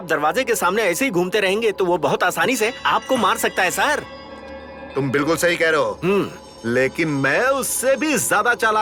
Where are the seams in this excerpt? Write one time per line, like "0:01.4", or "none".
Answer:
none